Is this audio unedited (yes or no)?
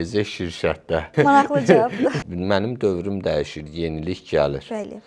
no